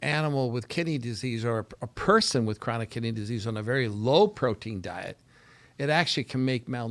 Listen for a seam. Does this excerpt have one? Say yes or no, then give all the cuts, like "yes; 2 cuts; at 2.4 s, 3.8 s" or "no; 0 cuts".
no; 0 cuts